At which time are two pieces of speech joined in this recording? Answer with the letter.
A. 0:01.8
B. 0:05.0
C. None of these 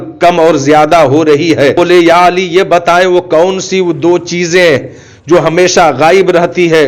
A